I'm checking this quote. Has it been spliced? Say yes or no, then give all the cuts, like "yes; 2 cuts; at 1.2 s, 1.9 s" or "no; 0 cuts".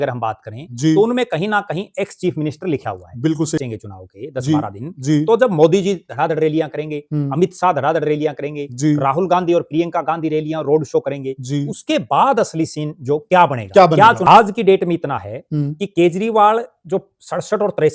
yes; 2 cuts; at 3.6 s, 14.2 s